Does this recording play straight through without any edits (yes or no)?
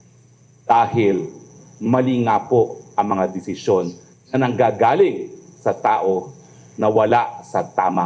yes